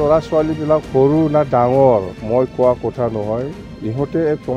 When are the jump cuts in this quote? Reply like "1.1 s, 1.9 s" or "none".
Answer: 2.2 s